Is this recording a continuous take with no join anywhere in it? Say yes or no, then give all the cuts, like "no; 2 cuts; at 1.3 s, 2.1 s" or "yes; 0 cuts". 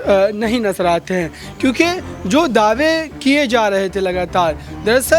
yes; 0 cuts